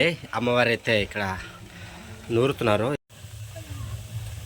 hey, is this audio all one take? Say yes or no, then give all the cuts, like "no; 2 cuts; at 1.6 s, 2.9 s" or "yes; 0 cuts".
no; 1 cut; at 3.0 s